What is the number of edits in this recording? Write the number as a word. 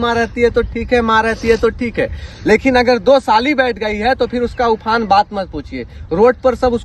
zero